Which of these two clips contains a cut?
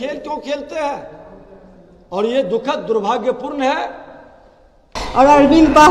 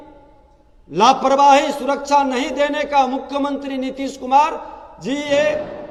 first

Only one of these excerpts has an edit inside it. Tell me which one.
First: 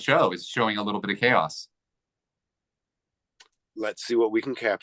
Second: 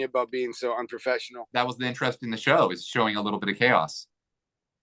second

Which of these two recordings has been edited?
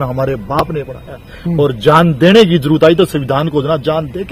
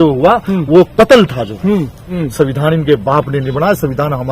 second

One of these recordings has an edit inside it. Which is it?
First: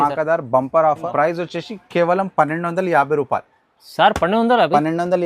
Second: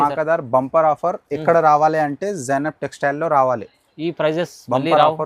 first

